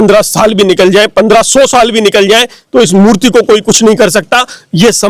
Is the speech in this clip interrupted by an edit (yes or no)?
no